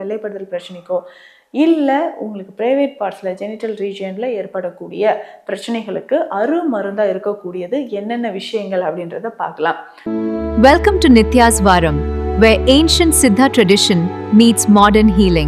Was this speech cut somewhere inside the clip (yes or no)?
yes